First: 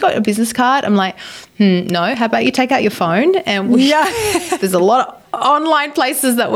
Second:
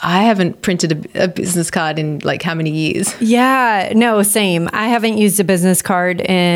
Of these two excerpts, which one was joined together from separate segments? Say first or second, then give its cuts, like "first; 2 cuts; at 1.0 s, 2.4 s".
second; 1 cut; at 3.1 s